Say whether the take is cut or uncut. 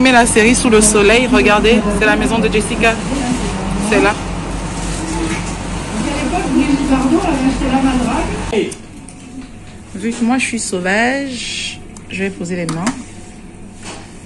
cut